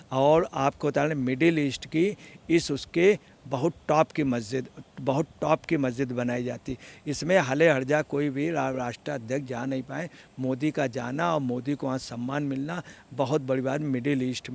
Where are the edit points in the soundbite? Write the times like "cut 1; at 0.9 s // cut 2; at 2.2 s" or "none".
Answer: none